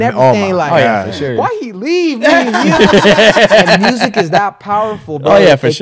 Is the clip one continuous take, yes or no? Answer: yes